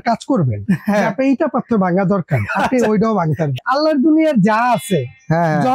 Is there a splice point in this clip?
yes; 1 cut; at 3.5 s

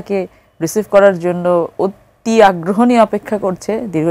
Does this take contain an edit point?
no; 0 cuts

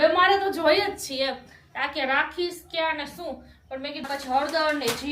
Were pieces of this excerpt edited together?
yes; 1 cut; at 4.1 s

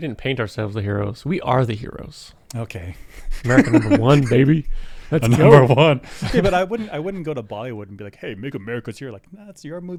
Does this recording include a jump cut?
no; 0 cuts

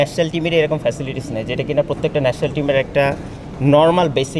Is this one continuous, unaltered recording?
yes; 0 cuts

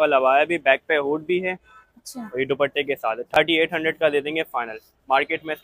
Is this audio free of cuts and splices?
yes; 0 cuts

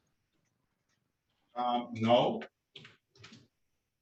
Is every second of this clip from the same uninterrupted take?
yes; 0 cuts

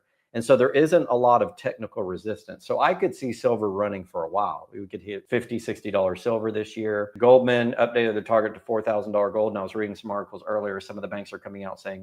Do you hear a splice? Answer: yes; 2 cuts; at 5.2 s, 7.1 s

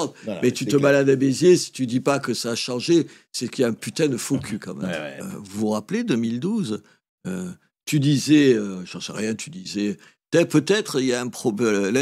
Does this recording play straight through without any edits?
no; 1 cut; at 5.3 s

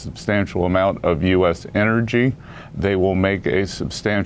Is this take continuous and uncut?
yes; 0 cuts

